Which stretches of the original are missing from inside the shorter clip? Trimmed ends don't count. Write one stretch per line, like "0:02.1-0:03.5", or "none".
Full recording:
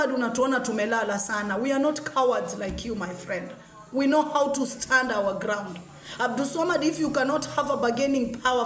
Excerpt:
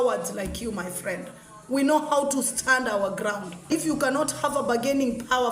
0:05.9-0:06.8